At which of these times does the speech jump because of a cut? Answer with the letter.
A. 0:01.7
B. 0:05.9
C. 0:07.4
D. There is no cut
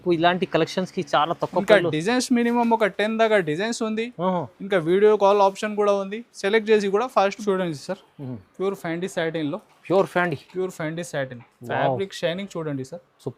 C